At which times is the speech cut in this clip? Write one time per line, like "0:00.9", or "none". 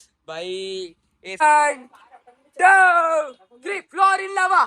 0:01.4